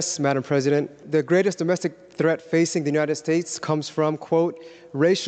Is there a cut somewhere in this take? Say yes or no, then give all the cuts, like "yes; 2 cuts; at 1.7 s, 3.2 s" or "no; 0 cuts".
yes; 1 cut; at 1.0 s